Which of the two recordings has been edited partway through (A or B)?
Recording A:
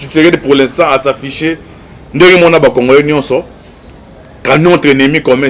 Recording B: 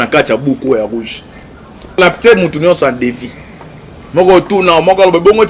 B